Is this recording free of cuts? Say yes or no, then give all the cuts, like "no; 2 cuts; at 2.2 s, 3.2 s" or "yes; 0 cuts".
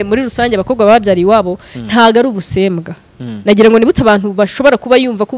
yes; 0 cuts